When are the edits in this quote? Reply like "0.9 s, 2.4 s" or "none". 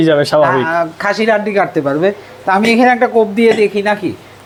none